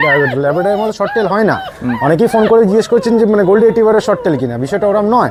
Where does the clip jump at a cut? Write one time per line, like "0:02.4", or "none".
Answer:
none